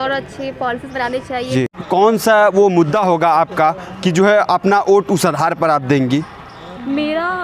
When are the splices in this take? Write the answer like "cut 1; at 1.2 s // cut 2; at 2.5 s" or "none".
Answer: cut 1; at 1.7 s